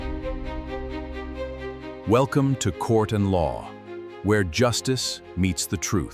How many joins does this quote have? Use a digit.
0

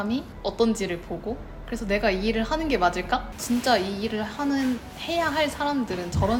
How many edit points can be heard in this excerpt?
1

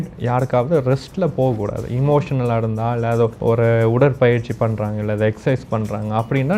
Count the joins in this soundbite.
1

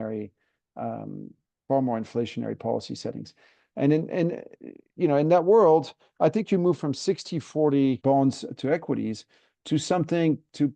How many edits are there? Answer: 1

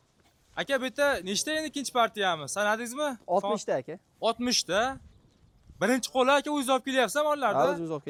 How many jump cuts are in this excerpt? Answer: 0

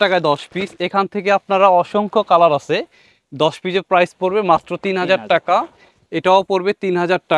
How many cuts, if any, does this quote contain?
0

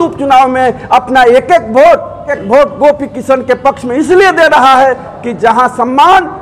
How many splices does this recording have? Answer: 1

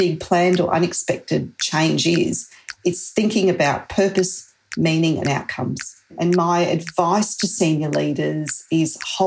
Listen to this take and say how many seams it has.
1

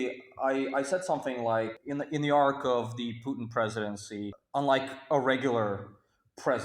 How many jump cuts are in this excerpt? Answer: 2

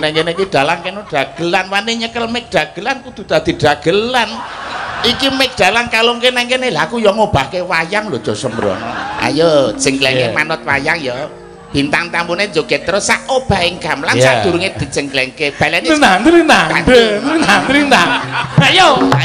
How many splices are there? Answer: 1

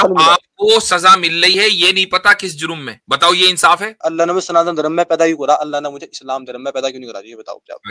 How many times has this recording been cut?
2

